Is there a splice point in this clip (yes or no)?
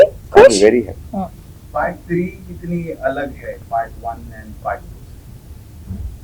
no